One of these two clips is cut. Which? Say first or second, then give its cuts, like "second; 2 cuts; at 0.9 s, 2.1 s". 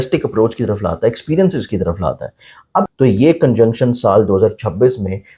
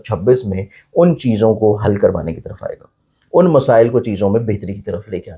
first; 1 cut; at 2.9 s